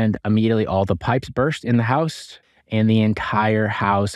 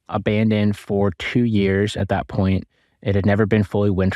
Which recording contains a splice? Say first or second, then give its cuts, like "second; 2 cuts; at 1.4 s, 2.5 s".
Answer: first; 1 cut; at 2.4 s